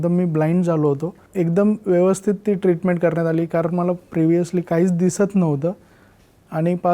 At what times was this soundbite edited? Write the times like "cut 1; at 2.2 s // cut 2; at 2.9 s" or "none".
cut 1; at 1.2 s